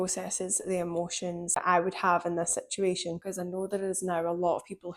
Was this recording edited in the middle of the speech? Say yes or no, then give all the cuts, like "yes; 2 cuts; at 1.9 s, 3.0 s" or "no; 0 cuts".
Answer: yes; 2 cuts; at 1.6 s, 3.2 s